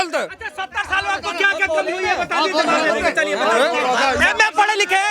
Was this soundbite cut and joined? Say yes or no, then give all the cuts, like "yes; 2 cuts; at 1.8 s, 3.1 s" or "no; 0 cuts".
no; 0 cuts